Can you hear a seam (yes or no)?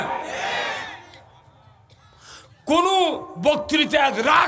no